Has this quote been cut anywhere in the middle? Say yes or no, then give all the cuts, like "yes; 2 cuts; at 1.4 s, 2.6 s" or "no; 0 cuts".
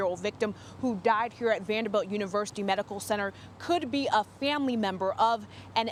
no; 0 cuts